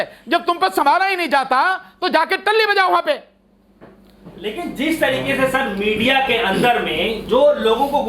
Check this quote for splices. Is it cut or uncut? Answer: uncut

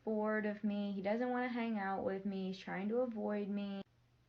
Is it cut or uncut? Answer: cut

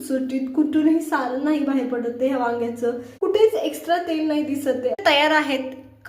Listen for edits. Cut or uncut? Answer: cut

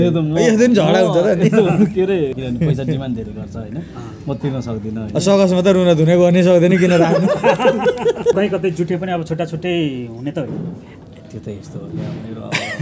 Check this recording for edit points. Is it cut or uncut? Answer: cut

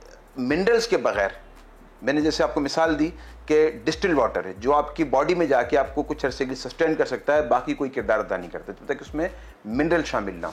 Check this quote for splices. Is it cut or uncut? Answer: uncut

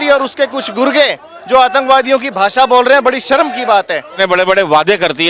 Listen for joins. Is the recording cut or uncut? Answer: cut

